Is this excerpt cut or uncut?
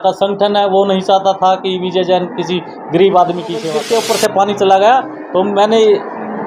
cut